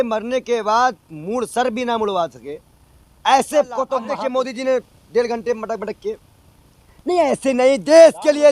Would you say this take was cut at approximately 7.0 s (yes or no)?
no